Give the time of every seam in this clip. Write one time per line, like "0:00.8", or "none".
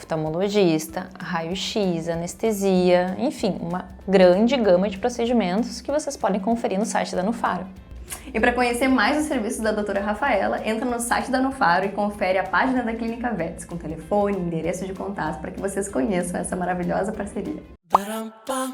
0:17.7